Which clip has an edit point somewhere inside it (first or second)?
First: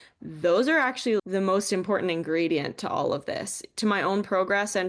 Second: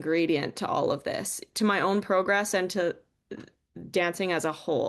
first